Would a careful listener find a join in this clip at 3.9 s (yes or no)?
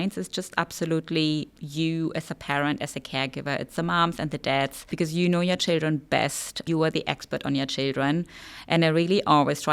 no